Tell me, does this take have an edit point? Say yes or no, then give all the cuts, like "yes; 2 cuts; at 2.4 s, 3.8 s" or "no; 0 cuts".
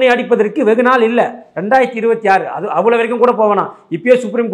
no; 0 cuts